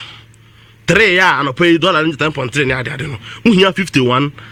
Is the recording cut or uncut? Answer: uncut